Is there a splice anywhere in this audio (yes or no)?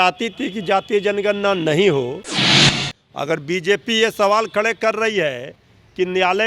yes